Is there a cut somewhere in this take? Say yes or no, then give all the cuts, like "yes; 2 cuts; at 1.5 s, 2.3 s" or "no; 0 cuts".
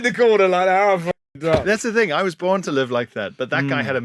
yes; 1 cut; at 1.6 s